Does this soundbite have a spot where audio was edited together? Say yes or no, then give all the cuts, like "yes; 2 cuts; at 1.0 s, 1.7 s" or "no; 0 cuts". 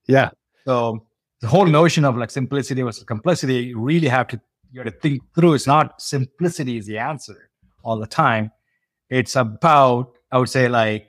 no; 0 cuts